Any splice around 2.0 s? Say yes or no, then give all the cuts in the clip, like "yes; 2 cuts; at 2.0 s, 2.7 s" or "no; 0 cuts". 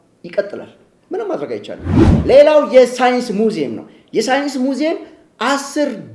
yes; 1 cut; at 2.0 s